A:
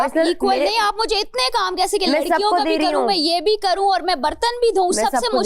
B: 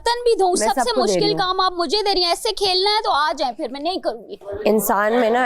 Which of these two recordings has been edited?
B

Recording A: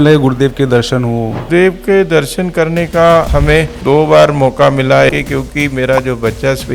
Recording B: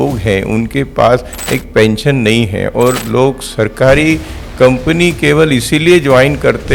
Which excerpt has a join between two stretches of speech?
A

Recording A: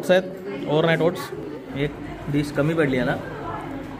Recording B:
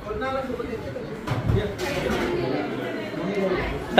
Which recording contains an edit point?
A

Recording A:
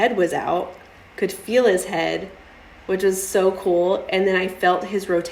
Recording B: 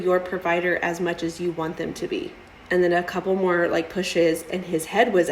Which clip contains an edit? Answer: B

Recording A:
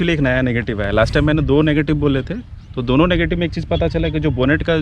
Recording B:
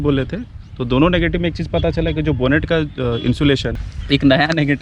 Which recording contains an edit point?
B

